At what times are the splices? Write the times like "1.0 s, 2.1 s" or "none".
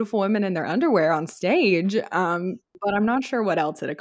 2.6 s

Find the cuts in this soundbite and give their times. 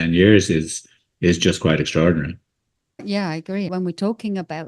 3.0 s, 3.7 s

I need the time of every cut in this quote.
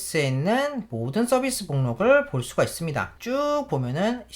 3.1 s

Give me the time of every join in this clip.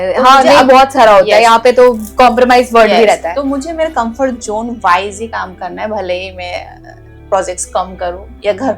none

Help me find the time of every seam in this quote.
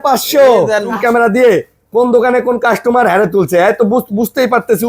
0.9 s

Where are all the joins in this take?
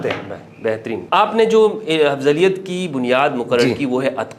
1.0 s

